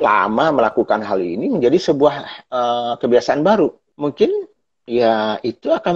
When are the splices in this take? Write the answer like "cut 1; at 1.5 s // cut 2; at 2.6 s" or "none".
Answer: cut 1; at 3.9 s